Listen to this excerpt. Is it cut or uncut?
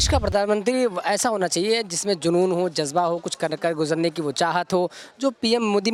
uncut